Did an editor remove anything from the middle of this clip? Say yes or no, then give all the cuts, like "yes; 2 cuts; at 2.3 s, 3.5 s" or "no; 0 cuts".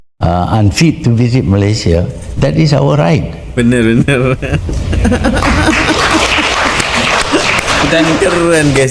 no; 0 cuts